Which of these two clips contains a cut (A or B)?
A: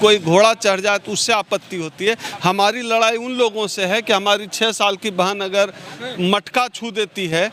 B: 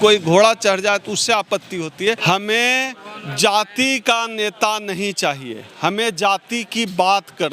B